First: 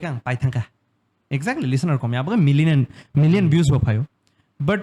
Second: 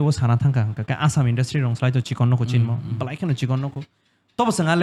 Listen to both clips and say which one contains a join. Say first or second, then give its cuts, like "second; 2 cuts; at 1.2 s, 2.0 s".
first; 1 cut; at 1.1 s